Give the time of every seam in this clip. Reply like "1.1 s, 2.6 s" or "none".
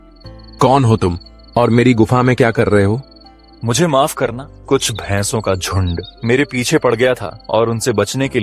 4.5 s, 6.1 s, 7.3 s